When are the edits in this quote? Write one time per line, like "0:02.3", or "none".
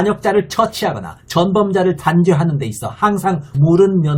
none